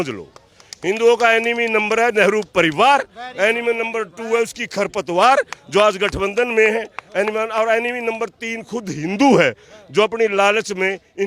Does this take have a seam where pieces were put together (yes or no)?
no